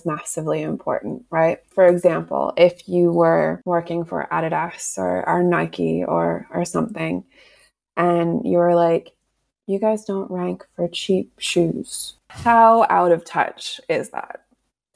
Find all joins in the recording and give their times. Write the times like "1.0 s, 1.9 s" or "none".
1.7 s, 3.6 s, 12.3 s